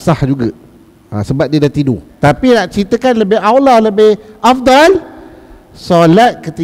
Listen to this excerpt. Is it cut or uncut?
cut